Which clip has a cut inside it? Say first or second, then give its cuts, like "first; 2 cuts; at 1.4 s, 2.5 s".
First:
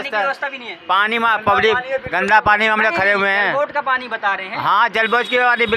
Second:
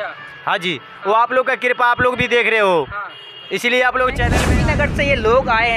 second; 1 cut; at 4.4 s